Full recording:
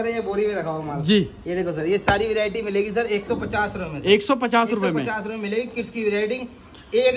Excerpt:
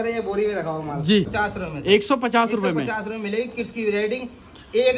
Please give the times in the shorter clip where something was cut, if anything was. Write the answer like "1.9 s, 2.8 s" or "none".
1.3 s